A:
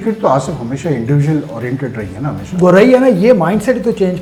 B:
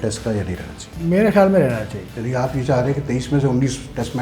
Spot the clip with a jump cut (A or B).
B